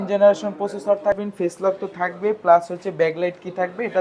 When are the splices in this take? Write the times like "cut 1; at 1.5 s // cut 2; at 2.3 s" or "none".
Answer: cut 1; at 1.2 s